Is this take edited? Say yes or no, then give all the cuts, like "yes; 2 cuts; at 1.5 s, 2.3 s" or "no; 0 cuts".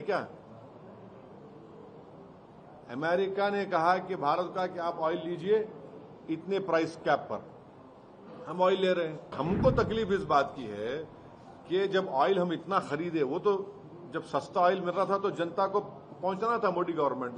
yes; 1 cut; at 9.3 s